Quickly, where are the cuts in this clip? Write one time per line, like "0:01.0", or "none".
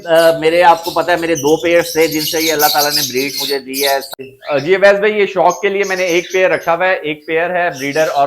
0:04.1